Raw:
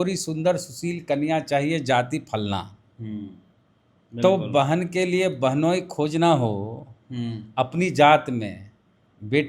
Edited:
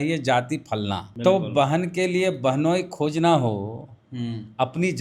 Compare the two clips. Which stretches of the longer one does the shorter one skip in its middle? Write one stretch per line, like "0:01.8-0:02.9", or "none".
0:02.7-0:04.1